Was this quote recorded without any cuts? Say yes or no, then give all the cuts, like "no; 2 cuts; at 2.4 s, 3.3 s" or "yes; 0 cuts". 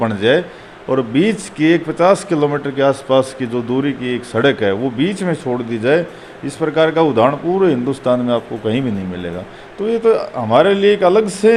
yes; 0 cuts